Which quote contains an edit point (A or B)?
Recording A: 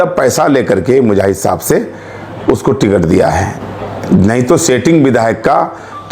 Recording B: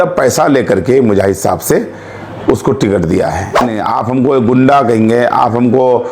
B